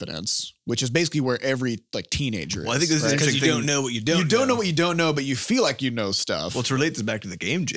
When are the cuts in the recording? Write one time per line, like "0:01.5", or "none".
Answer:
none